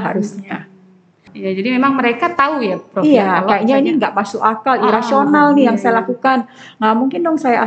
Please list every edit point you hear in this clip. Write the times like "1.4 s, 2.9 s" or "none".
1.3 s

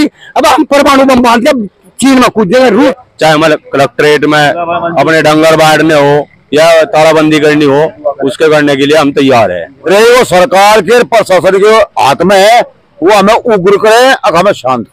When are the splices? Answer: 2.9 s, 9.7 s

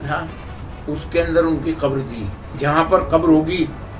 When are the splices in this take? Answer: 2.6 s

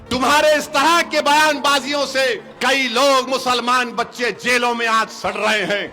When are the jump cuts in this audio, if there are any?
2.5 s

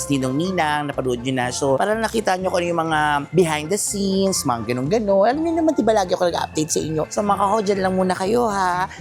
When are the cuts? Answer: none

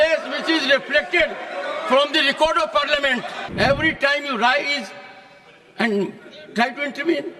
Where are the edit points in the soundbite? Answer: 3.4 s

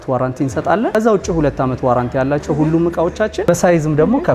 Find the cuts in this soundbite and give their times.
0.9 s, 3.4 s

